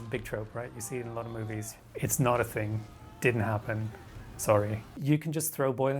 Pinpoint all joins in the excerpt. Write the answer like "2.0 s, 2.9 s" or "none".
5.0 s